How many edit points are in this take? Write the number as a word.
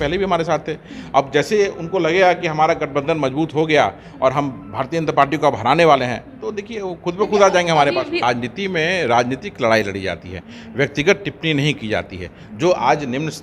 one